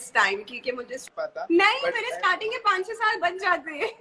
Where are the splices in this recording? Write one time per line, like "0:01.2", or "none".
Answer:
0:01.0